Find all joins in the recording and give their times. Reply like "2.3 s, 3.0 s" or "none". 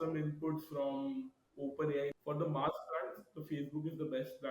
2.1 s